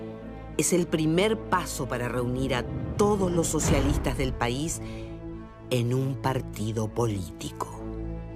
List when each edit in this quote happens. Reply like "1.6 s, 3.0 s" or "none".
1.7 s